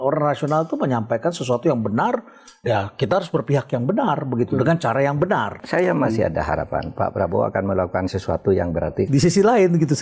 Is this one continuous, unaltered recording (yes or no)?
no